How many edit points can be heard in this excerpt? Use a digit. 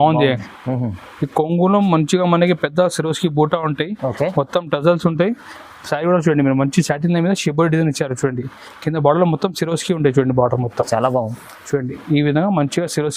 0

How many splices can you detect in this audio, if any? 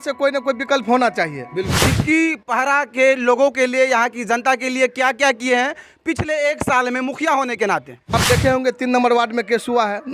2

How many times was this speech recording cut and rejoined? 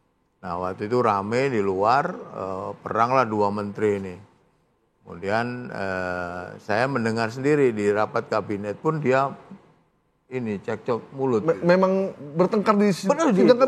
0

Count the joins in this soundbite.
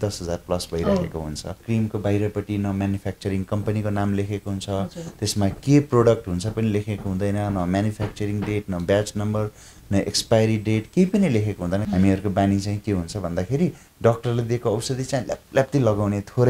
2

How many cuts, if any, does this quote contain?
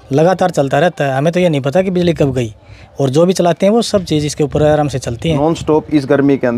1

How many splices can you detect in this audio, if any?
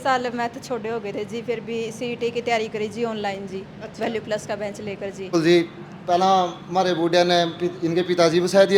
1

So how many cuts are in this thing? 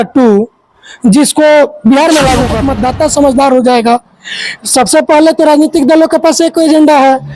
1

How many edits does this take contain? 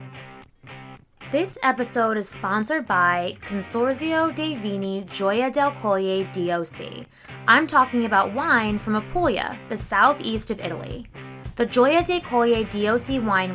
1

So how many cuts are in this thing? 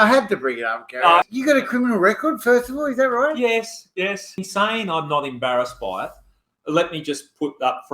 2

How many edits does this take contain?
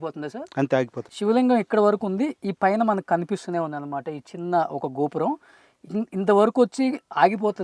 1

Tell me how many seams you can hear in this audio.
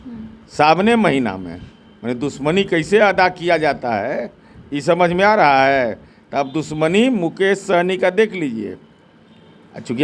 0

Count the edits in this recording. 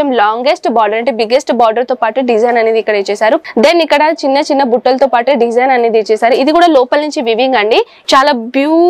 2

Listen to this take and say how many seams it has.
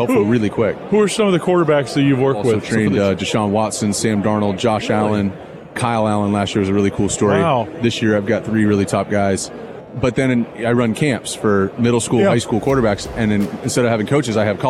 4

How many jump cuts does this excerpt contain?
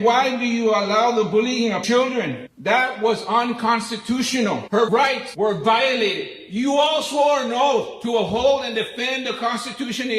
2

